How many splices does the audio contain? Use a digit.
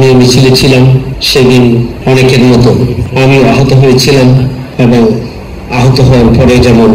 4